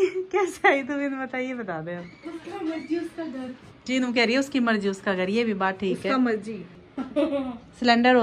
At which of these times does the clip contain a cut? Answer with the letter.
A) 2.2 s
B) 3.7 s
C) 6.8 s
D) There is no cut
C